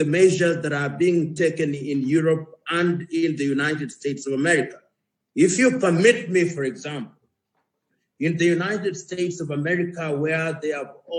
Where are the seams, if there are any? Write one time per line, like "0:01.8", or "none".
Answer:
none

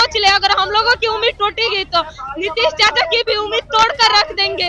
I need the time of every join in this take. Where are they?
none

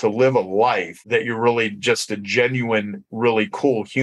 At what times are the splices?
0:00.9

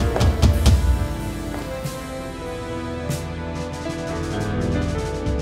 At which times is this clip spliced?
none

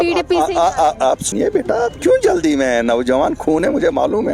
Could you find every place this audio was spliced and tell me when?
0:01.3

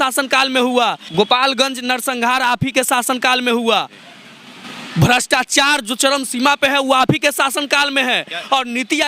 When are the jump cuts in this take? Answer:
0:01.0

